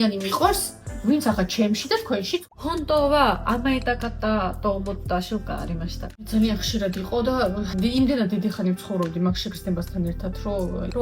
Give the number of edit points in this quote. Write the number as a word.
two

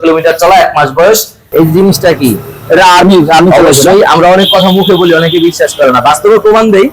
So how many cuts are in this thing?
one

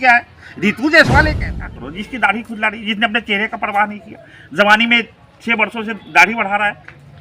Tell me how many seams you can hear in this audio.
one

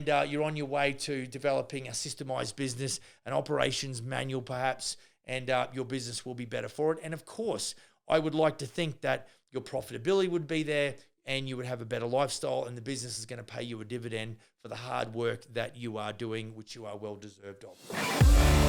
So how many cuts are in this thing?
one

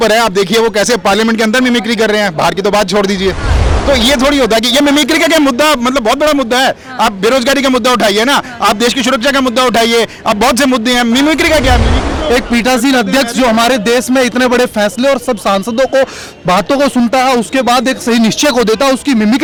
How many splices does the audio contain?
zero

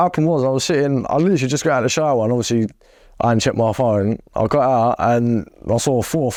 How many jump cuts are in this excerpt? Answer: zero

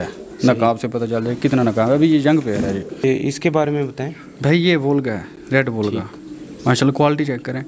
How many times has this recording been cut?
one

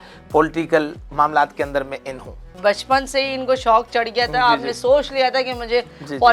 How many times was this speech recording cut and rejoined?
one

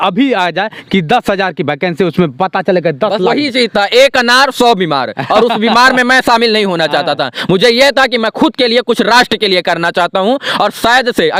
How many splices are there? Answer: zero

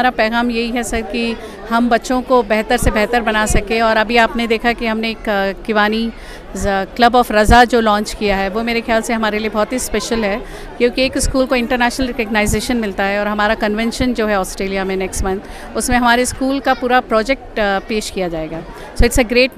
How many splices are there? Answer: zero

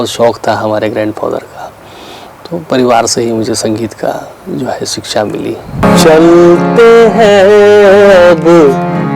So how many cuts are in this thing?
one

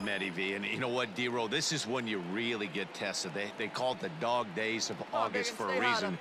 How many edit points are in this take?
zero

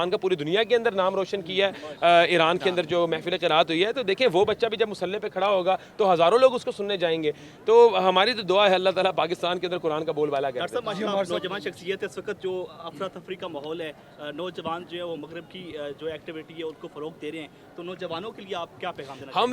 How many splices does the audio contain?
zero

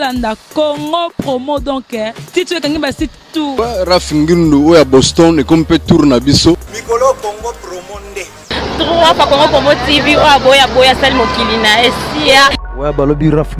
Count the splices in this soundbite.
three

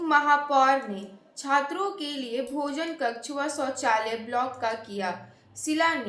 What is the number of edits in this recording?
zero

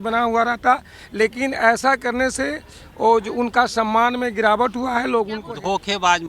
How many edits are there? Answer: one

